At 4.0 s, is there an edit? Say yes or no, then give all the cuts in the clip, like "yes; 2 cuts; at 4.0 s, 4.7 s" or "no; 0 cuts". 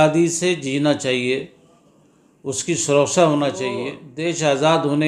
yes; 1 cut; at 4.0 s